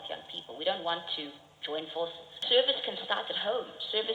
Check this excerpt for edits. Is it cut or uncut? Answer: cut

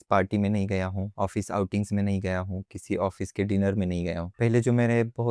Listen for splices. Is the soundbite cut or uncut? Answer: cut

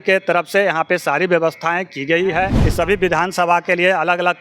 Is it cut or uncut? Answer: cut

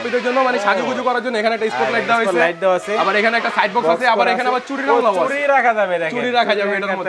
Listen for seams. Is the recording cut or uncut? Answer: uncut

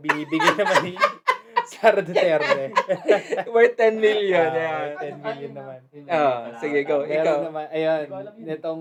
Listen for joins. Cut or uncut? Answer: uncut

